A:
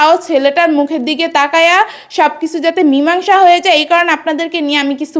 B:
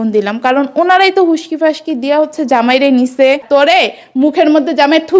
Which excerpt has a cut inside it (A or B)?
B